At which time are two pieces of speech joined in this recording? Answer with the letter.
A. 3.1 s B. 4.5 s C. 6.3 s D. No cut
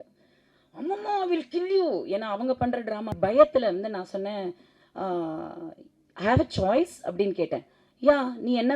A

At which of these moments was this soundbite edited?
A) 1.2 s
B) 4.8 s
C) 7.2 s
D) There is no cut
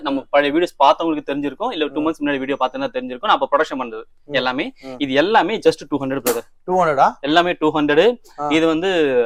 D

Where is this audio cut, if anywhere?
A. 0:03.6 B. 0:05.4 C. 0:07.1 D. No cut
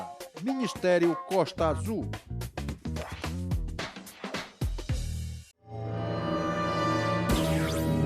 B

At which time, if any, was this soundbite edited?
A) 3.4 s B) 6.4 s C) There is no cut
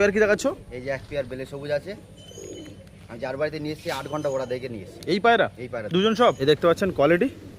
B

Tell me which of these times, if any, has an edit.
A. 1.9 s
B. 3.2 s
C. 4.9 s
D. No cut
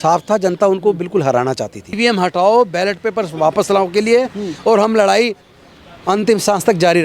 A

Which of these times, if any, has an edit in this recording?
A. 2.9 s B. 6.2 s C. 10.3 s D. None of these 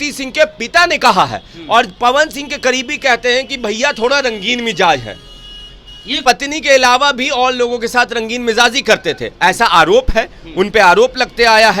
B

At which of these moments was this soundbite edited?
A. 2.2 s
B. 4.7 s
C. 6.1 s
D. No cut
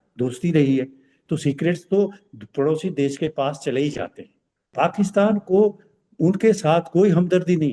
B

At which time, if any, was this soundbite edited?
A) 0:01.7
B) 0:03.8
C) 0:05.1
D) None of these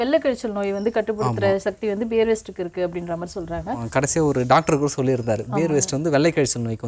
B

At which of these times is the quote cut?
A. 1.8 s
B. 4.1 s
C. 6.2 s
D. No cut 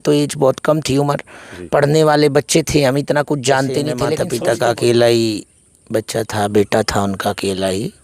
B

